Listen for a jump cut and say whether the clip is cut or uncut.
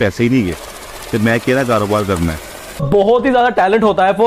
cut